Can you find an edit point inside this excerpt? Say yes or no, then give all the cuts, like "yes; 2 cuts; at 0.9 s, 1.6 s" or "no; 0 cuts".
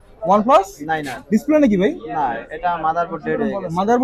no; 0 cuts